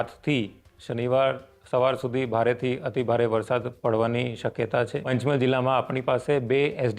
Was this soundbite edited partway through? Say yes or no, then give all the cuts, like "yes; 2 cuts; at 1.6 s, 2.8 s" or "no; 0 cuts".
yes; 1 cut; at 5.1 s